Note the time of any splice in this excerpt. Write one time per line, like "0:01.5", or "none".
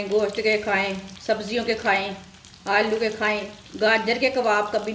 0:01.1
0:03.6